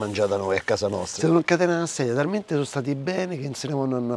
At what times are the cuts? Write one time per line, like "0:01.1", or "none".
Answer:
0:01.1

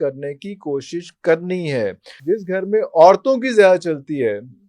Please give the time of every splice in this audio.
0:02.2

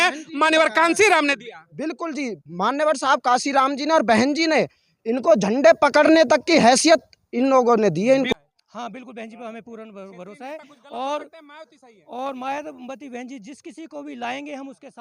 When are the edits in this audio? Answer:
0:08.3

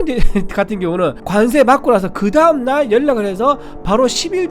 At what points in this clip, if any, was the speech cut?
0:01.2

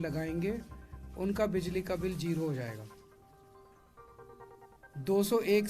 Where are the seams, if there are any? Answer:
0:02.9
0:04.7

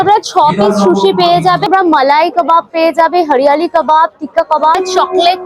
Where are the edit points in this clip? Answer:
0:01.7
0:04.8

